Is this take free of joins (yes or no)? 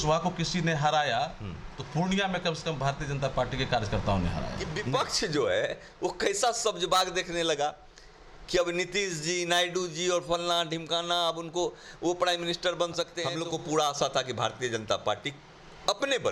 no